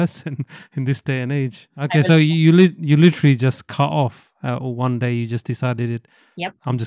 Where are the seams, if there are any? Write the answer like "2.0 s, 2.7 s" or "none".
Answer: 1.9 s